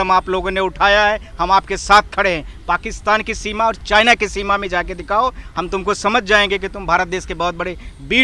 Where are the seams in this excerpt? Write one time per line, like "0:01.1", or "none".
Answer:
none